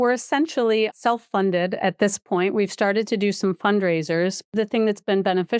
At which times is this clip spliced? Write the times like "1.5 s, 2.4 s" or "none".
0.9 s, 4.5 s

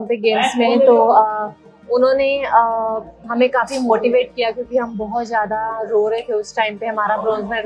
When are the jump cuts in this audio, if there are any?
none

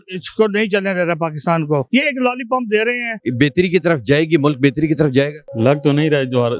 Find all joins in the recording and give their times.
1.9 s, 3.1 s, 5.4 s

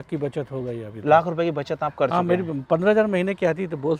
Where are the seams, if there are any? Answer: none

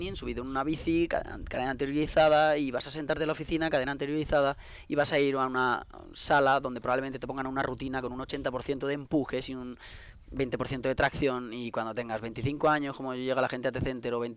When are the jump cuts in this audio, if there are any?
none

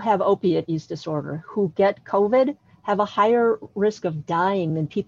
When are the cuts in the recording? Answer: none

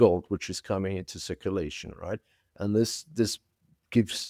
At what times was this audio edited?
none

